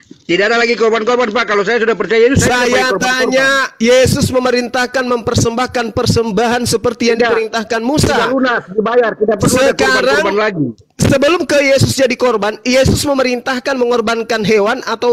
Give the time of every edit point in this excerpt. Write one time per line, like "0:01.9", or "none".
none